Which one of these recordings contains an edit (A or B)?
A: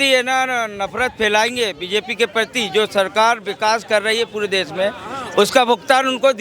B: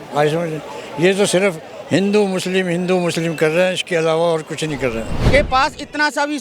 B